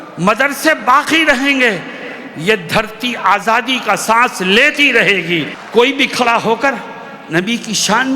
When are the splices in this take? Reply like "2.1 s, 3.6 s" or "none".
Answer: 5.6 s